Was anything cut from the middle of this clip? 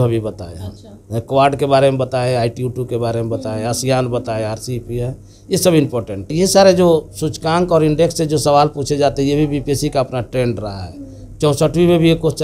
yes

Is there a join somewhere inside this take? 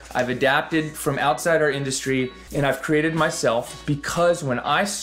yes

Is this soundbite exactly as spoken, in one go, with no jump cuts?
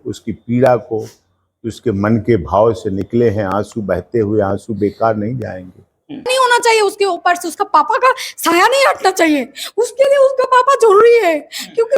no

